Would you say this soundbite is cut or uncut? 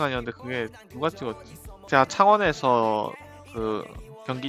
uncut